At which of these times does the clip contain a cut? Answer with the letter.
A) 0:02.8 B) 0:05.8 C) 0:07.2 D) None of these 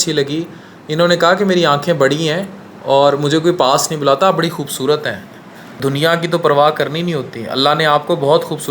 B